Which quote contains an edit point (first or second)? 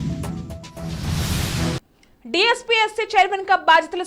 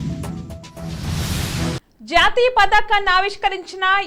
first